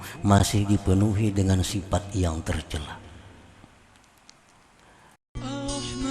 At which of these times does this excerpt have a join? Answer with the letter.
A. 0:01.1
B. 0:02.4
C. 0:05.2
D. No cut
C